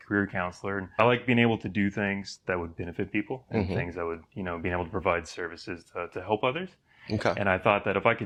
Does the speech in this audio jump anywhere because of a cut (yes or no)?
no